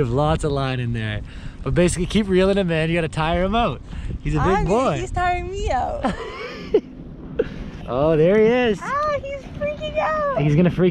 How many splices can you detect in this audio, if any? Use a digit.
1